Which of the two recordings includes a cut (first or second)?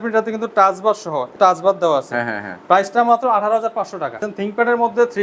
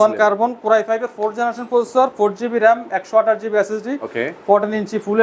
first